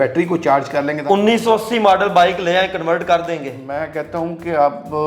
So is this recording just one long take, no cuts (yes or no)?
no